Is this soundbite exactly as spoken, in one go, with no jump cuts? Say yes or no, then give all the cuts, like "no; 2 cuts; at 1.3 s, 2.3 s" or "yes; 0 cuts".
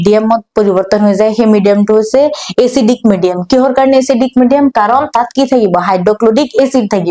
yes; 0 cuts